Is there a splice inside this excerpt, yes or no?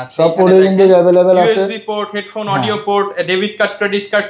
no